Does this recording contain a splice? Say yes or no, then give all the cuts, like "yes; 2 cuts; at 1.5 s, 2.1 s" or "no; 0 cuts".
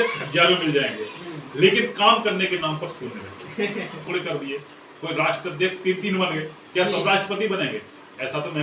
yes; 1 cut; at 4.1 s